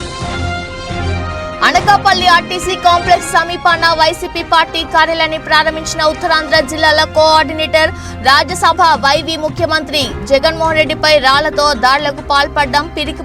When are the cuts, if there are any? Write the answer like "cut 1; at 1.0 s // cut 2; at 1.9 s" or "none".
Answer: cut 1; at 1.3 s